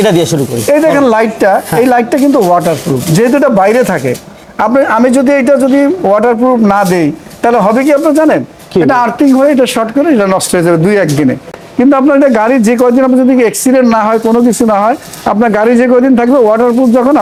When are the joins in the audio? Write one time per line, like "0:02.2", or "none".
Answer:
none